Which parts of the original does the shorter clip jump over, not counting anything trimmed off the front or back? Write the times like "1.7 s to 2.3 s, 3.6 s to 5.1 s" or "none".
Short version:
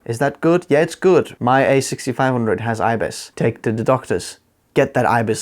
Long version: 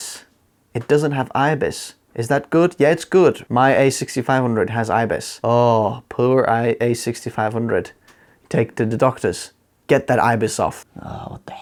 5.3 s to 8.3 s